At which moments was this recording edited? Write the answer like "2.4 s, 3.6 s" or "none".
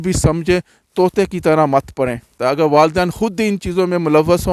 2.3 s